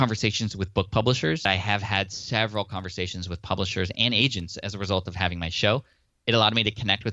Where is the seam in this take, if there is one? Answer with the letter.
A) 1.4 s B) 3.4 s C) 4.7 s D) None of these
A